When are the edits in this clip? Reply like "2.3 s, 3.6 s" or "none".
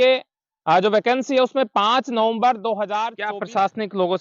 3.2 s